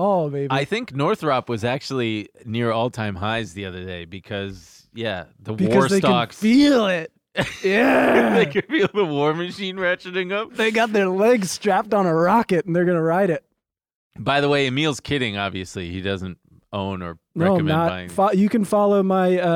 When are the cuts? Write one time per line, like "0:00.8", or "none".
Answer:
none